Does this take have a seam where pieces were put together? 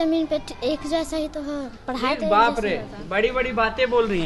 no; 0 cuts

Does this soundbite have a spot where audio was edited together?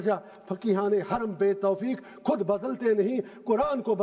no; 0 cuts

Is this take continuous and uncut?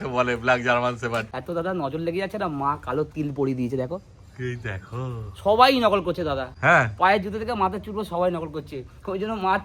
no; 2 cuts; at 1.3 s, 6.5 s

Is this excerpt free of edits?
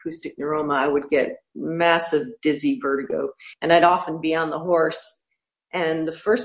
no; 1 cut; at 3.4 s

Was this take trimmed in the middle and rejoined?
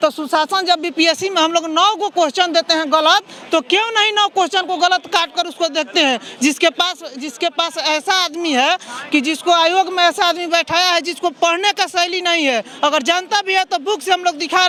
no; 0 cuts

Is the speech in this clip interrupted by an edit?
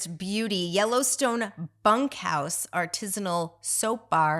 no; 0 cuts

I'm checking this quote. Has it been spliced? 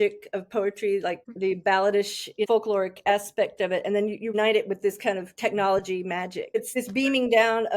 yes; 4 cuts; at 1.2 s, 2.5 s, 4.3 s, 6.7 s

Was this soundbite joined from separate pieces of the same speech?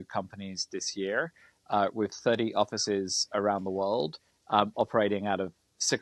no; 0 cuts

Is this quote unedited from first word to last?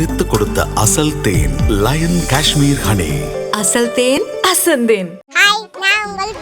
no; 1 cut; at 5.3 s

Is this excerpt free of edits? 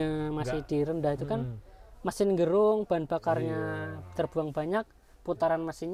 yes; 0 cuts

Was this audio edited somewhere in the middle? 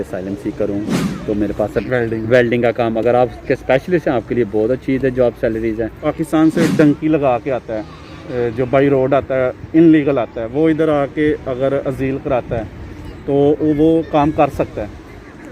yes; 2 cuts; at 1.8 s, 6.0 s

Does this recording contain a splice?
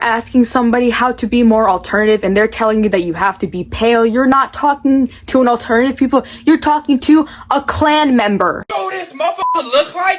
no; 0 cuts

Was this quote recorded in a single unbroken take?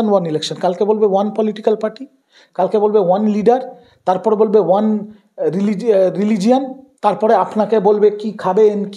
yes; 0 cuts

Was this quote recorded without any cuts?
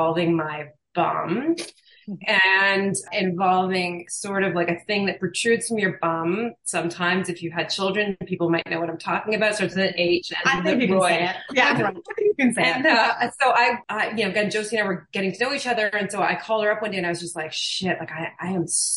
yes; 0 cuts

